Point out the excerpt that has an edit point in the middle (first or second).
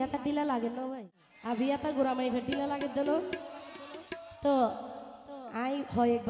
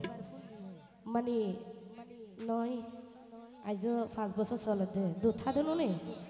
first